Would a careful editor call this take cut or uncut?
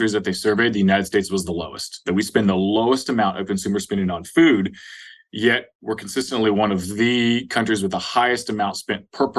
uncut